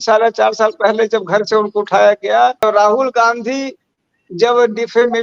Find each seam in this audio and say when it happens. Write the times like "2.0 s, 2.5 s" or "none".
2.6 s

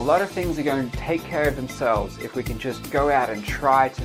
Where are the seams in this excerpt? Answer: none

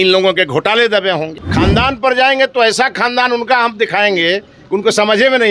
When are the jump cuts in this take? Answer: 1.4 s

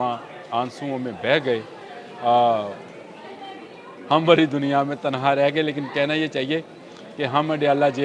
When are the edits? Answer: none

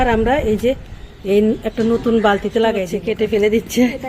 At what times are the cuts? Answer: 2.9 s

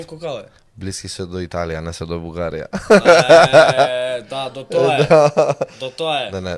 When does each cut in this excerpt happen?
none

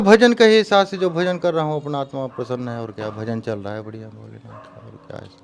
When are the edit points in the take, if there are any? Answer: none

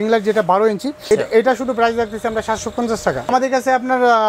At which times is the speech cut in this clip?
1.0 s, 3.3 s

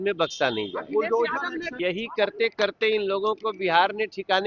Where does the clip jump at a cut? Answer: 1.7 s

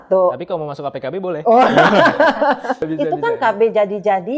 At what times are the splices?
2.8 s

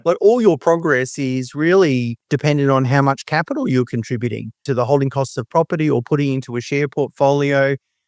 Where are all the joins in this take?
2.2 s, 4.6 s

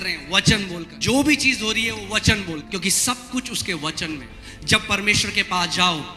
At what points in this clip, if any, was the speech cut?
0.9 s, 2.6 s, 4.3 s

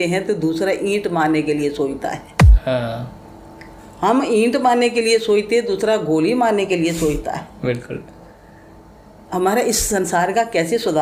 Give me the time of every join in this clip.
none

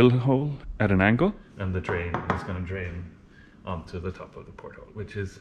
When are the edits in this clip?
1.5 s

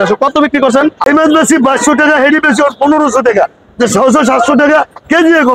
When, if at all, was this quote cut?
1.0 s

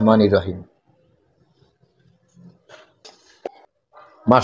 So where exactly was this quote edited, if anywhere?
3.5 s

